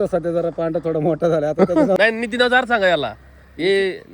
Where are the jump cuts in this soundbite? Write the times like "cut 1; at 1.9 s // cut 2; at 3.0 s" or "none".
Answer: cut 1; at 2.0 s